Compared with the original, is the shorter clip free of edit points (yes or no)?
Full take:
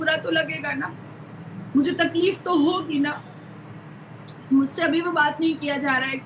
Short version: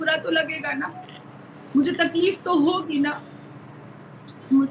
yes